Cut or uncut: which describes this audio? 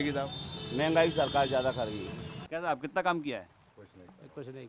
cut